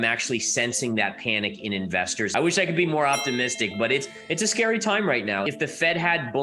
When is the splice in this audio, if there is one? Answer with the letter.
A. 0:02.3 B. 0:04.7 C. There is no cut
A